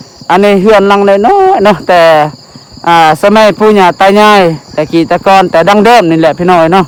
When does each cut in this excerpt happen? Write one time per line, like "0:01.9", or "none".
none

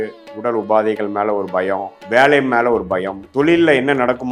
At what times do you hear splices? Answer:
0:01.9
0:03.2

